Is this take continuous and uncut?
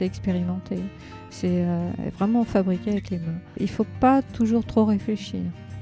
no; 1 cut; at 3.6 s

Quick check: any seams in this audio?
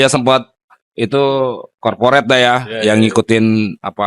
no; 0 cuts

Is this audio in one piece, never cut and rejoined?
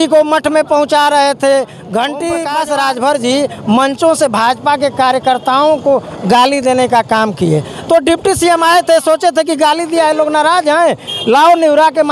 no; 1 cut; at 2.5 s

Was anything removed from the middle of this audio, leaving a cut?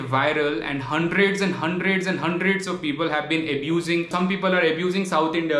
yes; 1 cut; at 4.1 s

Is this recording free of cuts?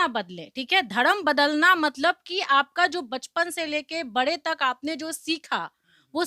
yes; 0 cuts

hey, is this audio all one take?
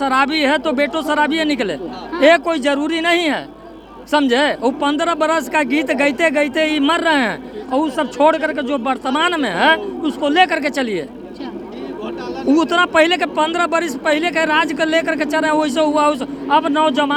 yes; 0 cuts

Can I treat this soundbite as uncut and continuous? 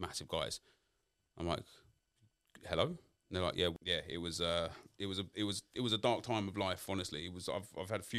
no; 1 cut; at 3.7 s

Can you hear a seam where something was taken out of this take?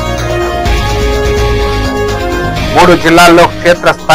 yes; 1 cut; at 2.5 s

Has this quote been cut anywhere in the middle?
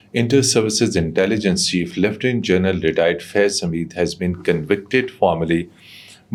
no; 0 cuts

